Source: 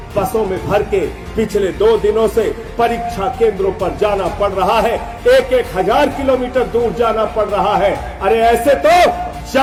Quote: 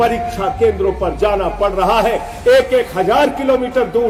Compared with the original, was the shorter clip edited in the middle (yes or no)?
no